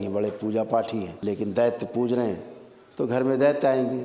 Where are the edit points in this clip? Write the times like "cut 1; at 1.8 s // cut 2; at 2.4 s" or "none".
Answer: cut 1; at 1.1 s